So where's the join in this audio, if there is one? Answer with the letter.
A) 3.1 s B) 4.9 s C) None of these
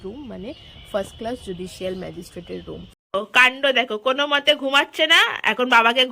A